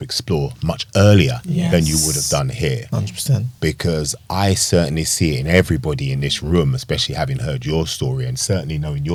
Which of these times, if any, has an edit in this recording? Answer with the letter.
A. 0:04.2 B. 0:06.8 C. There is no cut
C